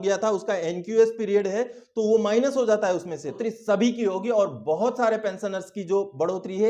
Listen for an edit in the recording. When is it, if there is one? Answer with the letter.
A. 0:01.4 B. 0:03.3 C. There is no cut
B